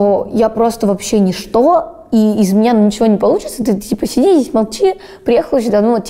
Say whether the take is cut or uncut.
uncut